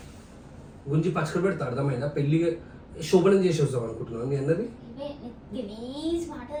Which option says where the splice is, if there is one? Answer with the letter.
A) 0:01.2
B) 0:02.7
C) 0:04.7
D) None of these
D